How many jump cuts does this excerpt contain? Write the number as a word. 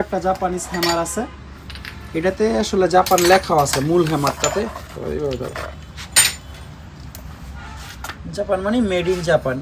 zero